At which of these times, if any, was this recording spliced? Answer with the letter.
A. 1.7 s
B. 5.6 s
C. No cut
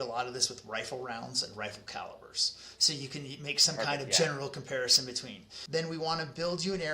B